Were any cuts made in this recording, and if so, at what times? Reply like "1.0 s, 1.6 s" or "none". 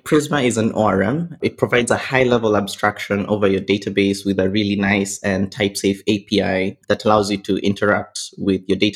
1.4 s